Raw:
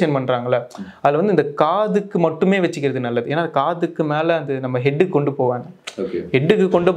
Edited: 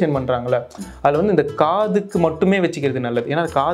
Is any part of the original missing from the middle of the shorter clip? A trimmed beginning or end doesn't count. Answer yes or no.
no